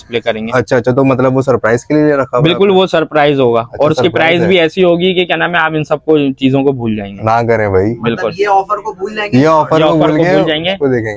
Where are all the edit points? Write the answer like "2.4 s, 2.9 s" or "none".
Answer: none